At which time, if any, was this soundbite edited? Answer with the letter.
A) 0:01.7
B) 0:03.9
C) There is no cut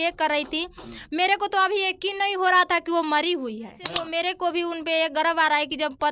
B